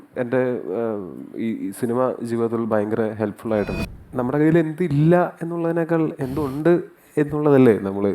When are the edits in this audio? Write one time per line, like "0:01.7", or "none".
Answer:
0:03.8